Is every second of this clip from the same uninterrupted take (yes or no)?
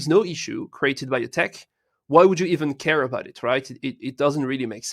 yes